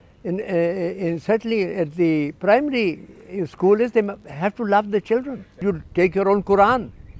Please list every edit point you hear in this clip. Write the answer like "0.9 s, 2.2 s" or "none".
5.6 s